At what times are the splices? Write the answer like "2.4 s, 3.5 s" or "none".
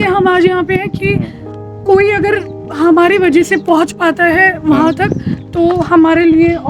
none